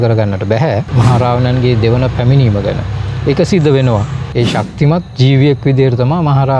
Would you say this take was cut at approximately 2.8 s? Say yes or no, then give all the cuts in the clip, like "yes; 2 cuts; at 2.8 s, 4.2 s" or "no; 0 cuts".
no; 2 cuts; at 0.9 s, 4.2 s